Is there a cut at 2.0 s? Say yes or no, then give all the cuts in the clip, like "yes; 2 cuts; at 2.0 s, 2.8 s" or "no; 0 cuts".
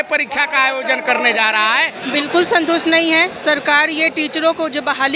yes; 1 cut; at 2.0 s